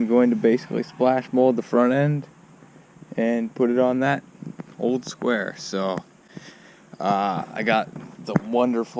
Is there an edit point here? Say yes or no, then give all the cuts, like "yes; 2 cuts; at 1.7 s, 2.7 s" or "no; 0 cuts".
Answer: no; 0 cuts